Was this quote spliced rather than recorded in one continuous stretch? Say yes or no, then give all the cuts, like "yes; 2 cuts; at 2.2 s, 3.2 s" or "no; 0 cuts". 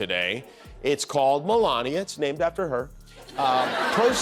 no; 0 cuts